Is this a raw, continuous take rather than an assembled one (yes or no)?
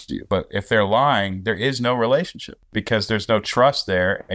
no